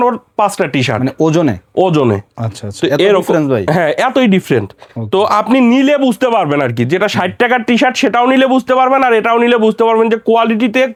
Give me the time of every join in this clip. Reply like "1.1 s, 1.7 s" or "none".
none